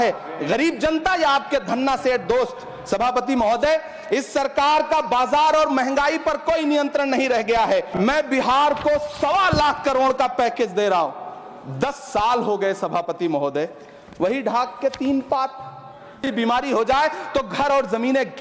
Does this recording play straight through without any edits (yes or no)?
no